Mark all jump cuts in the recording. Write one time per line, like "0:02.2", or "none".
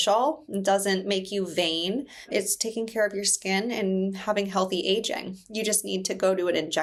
none